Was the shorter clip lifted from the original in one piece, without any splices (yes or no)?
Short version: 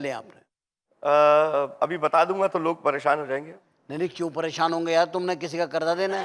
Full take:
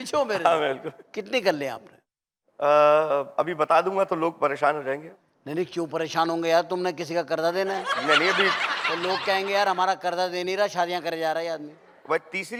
yes